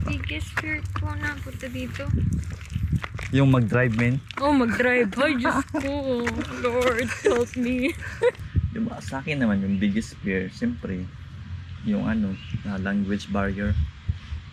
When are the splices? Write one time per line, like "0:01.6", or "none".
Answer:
0:08.4